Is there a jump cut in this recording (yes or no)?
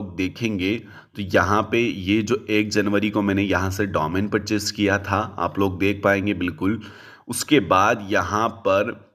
no